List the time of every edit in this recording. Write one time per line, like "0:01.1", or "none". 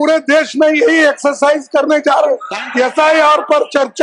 0:02.6